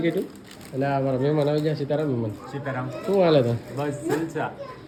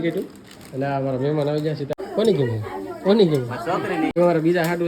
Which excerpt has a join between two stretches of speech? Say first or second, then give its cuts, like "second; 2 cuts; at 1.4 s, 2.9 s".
second; 2 cuts; at 1.9 s, 4.1 s